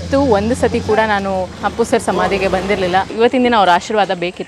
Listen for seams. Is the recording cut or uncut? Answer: cut